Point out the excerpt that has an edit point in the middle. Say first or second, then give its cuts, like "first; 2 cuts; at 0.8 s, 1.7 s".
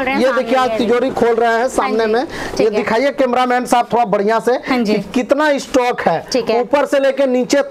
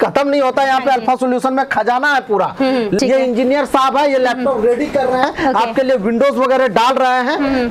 second; 1 cut; at 3.0 s